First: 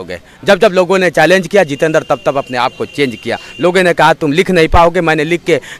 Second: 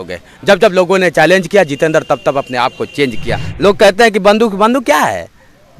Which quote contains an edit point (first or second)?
second